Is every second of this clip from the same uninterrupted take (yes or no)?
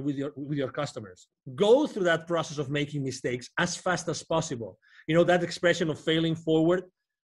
no